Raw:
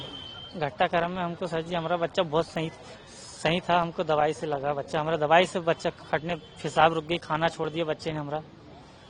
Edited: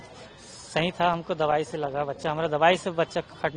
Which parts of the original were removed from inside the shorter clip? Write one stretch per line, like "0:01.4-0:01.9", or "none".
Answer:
none